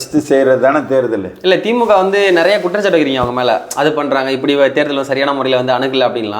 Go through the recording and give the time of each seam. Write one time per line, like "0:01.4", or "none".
none